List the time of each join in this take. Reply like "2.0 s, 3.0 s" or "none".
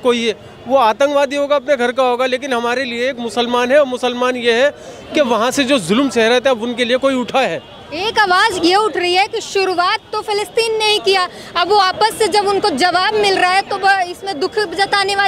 none